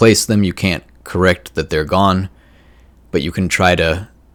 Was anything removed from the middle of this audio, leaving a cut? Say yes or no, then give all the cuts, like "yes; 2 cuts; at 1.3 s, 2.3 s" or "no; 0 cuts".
no; 0 cuts